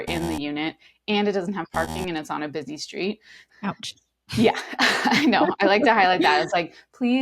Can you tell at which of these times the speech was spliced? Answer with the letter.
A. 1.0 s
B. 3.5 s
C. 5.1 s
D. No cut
B